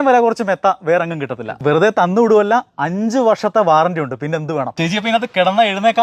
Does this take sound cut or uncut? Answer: cut